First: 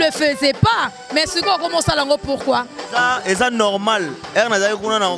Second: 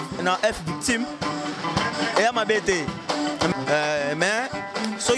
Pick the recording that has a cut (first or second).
second